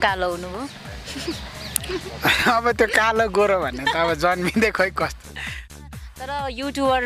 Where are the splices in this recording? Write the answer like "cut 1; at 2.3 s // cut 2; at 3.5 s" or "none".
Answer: cut 1; at 5.8 s